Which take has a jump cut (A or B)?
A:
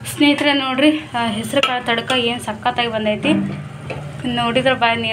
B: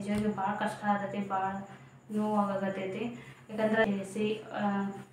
B